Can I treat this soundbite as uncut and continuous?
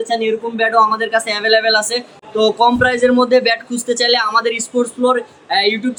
yes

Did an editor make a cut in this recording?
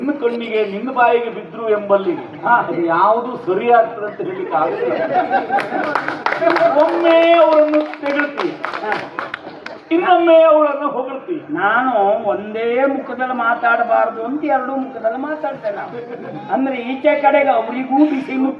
no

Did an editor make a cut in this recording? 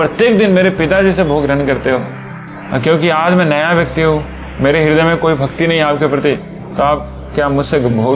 no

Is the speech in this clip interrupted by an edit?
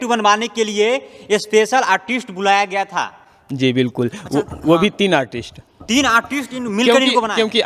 no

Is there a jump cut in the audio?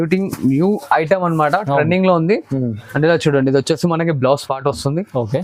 no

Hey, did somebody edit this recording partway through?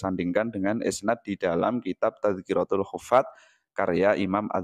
no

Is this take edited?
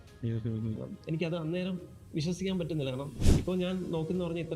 yes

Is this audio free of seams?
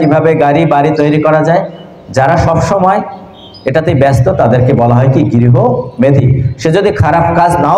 yes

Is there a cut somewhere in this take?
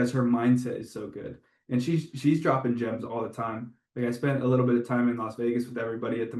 no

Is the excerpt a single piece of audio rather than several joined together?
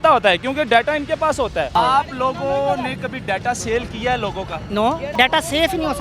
no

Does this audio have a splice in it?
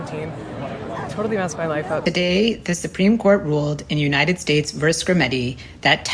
yes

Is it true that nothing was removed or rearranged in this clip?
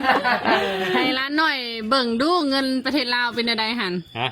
no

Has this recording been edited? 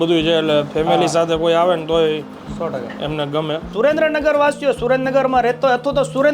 yes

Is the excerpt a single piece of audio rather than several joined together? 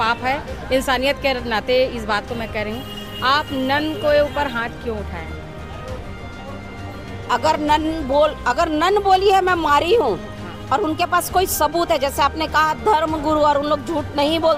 yes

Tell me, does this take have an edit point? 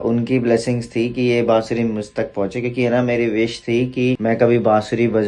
no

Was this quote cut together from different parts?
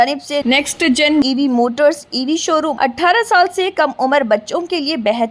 yes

